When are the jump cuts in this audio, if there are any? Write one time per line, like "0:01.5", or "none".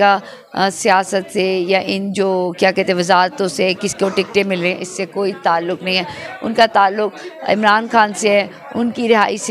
none